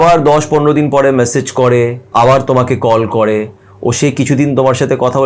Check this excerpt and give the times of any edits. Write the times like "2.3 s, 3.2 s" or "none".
2.0 s